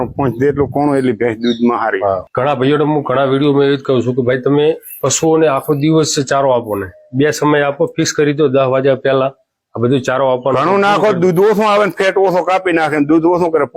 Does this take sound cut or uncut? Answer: cut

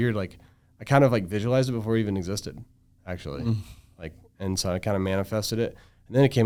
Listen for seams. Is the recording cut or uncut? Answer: uncut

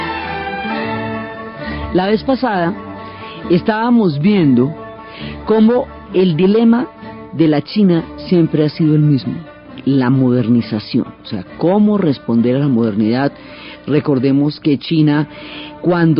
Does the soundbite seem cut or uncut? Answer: cut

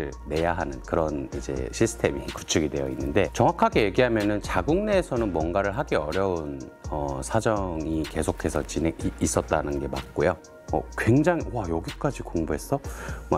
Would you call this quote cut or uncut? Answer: cut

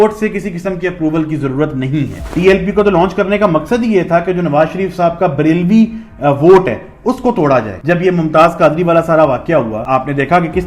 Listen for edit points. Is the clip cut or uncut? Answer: cut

